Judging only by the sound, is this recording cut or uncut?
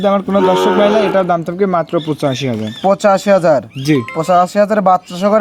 uncut